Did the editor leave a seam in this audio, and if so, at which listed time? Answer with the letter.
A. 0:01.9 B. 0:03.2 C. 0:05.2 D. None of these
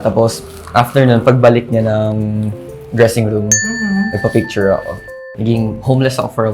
C